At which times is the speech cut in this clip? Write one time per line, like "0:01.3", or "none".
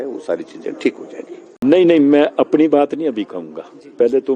0:01.4